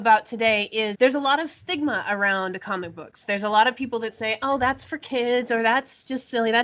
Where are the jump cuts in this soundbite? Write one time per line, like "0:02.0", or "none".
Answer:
0:00.9